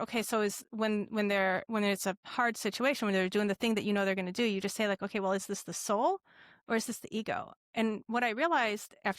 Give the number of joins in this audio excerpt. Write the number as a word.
one